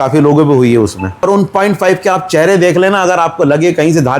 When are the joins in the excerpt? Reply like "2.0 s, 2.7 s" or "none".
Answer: 1.2 s

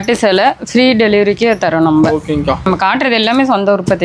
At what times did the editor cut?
2.7 s

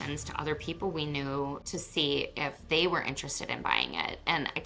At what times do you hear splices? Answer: 1.7 s

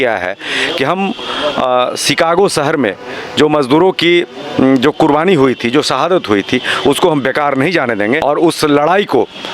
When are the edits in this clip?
8.2 s

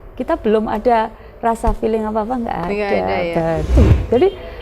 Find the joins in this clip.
3.7 s

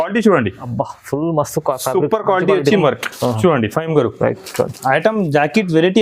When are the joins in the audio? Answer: 2.8 s

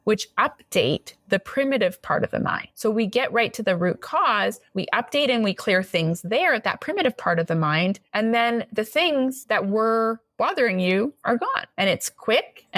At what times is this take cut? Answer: none

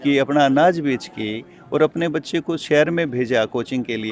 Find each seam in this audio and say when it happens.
none

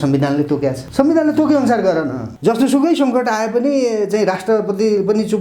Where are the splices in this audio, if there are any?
0.8 s, 2.2 s

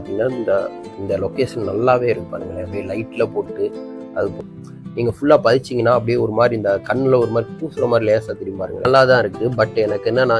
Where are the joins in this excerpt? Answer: 4.4 s, 8.8 s

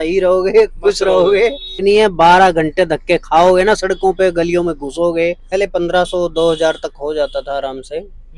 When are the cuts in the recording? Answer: 1.8 s, 5.4 s

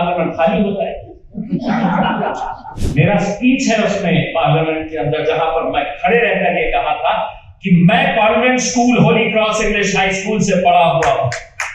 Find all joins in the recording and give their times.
2.7 s

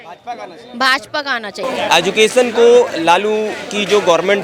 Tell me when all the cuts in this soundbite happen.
1.6 s

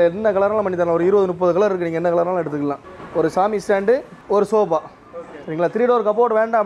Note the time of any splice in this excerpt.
2.9 s, 4.1 s

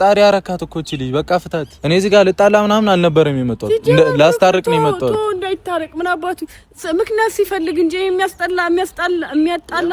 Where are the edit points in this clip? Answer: 1.7 s

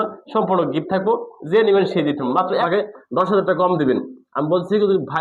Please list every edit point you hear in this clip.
2.6 s

